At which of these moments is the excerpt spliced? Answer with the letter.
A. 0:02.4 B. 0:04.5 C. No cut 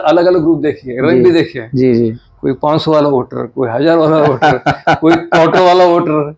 C